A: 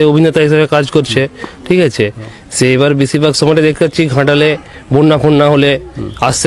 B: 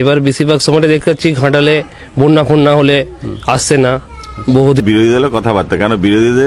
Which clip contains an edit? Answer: B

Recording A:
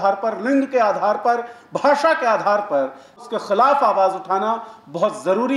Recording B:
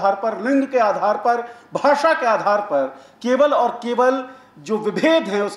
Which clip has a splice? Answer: A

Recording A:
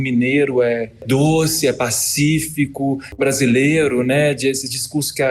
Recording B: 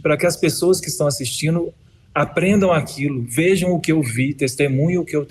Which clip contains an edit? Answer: A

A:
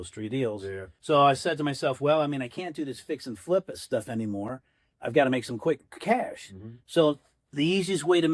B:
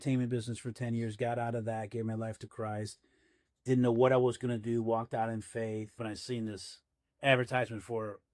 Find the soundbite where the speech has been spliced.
B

